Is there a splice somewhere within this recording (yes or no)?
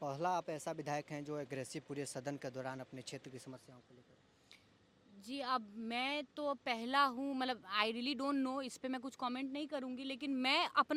no